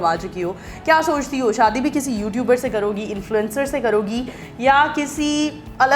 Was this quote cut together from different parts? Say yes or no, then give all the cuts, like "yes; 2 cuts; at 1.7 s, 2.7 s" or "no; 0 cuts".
no; 0 cuts